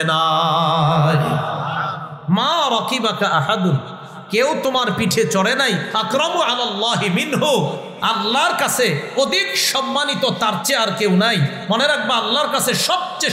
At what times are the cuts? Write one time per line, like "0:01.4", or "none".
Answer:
none